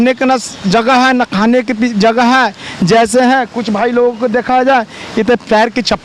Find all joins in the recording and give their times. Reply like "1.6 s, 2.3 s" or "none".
none